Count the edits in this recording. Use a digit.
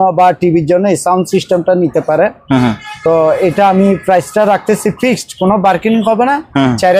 0